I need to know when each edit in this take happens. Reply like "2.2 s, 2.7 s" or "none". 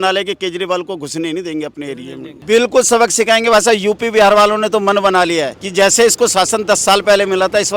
2.4 s, 5.6 s